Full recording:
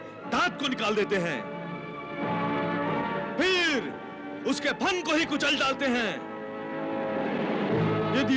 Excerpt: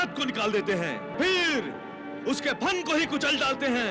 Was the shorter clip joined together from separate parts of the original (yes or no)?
yes